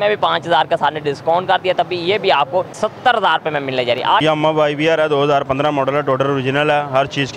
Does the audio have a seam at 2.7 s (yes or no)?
yes